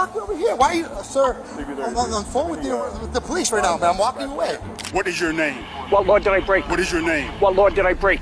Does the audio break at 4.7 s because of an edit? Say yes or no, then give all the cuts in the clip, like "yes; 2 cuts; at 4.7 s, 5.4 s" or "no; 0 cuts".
yes; 1 cut; at 4.7 s